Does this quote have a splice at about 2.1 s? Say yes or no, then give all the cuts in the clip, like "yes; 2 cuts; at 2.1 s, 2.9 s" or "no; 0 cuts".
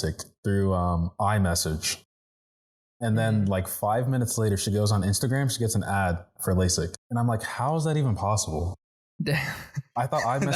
no; 1 cut; at 7.0 s